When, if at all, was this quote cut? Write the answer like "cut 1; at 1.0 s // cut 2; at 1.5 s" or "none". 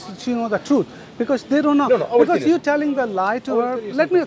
none